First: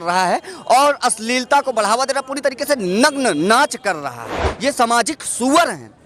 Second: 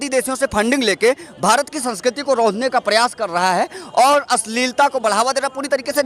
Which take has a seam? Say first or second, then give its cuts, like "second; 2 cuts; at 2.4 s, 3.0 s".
first; 1 cut; at 4.5 s